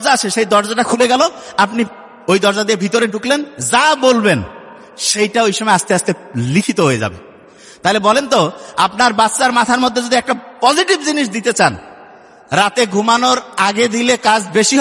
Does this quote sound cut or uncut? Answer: uncut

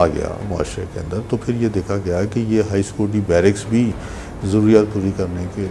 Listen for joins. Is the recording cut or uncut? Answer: uncut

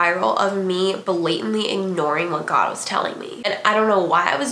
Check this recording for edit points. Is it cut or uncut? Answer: cut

